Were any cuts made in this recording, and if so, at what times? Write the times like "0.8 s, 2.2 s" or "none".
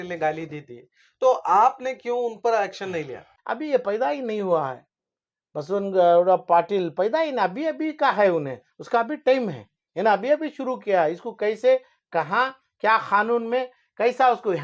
3.3 s